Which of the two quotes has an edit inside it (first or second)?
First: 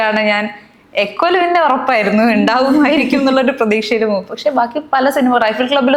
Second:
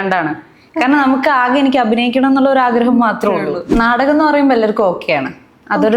second